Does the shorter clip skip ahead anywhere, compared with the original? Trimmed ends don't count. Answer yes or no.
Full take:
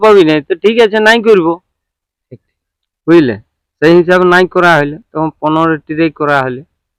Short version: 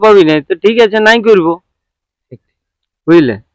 no